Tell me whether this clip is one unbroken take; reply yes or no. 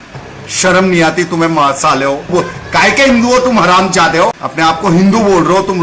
no